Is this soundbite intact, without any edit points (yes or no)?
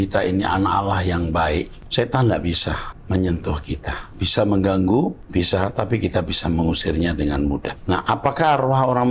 no